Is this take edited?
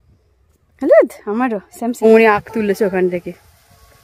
yes; 1 cut; at 2.0 s

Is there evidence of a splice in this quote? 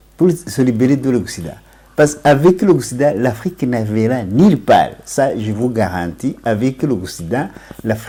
no; 0 cuts

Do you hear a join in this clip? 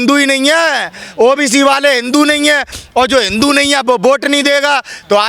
no; 0 cuts

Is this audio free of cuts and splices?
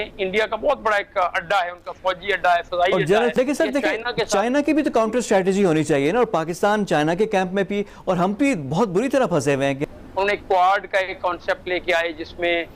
no; 2 cuts; at 3.3 s, 9.9 s

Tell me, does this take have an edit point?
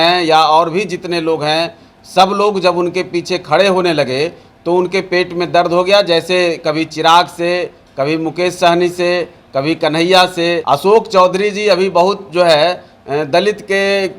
yes; 1 cut; at 10.6 s

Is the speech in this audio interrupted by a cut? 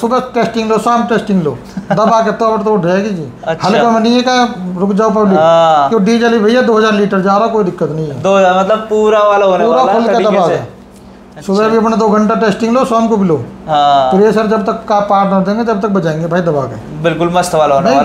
no; 0 cuts

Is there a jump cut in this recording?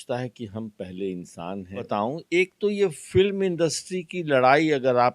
yes; 1 cut; at 1.9 s

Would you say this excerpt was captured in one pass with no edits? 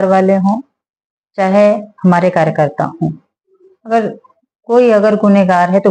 yes; 0 cuts

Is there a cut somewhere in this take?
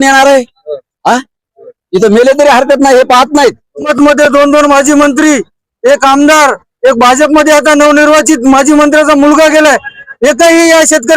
yes; 1 cut; at 3.9 s

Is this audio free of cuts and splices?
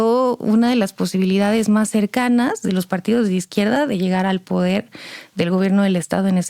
yes; 0 cuts

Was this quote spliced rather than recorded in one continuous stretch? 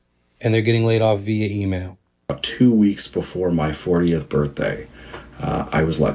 yes; 1 cut; at 2.4 s

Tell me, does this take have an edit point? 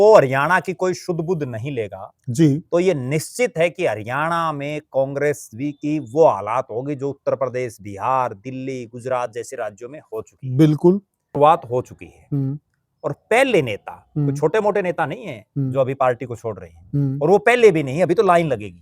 yes; 1 cut; at 11.2 s

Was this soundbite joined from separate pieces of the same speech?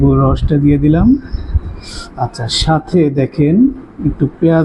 no; 0 cuts

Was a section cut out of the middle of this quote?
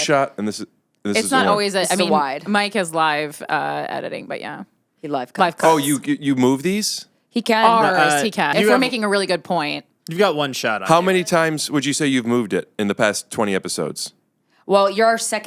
yes; 2 cuts; at 8.5 s, 10.8 s

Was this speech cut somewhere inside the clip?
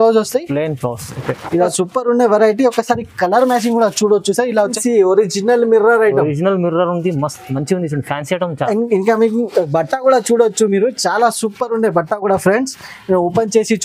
yes; 2 cuts; at 1.7 s, 4.8 s

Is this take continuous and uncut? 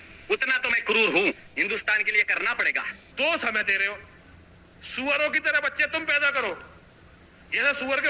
no; 1 cut; at 3.0 s

